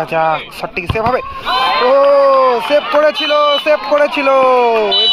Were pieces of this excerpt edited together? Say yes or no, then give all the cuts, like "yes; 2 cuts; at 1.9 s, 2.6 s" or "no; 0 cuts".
no; 0 cuts